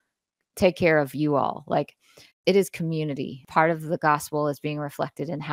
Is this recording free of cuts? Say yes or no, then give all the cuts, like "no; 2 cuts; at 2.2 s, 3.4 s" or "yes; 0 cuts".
no; 1 cut; at 3.4 s